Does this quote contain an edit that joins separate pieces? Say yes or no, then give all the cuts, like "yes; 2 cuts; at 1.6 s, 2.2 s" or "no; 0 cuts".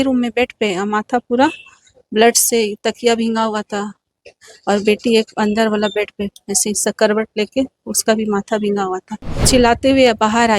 yes; 1 cut; at 9.4 s